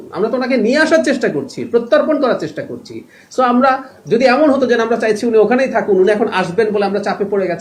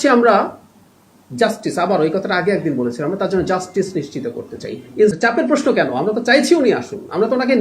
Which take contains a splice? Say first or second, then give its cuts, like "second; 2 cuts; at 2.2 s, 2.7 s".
second; 1 cut; at 5.1 s